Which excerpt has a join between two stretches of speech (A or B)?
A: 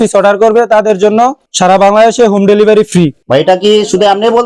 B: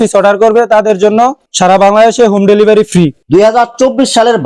B